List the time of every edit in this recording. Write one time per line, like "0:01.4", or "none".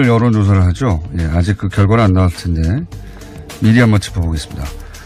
none